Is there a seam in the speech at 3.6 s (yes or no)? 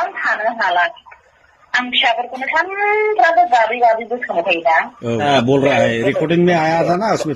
no